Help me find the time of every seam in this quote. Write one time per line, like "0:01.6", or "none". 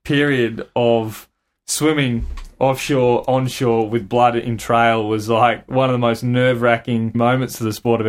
0:07.1